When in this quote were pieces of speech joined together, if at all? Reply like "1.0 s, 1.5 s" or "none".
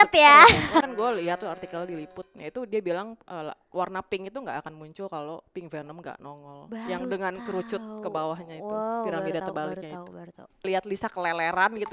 0.9 s, 10.6 s